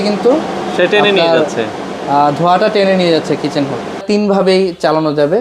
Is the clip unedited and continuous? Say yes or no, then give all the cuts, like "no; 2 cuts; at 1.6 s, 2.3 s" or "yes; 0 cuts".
no; 1 cut; at 4.0 s